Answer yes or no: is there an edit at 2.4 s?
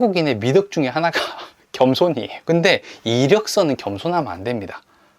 yes